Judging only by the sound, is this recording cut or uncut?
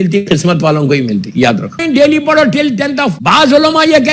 cut